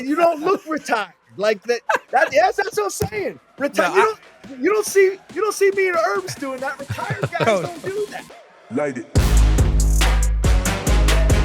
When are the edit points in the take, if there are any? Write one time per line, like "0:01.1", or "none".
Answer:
0:08.1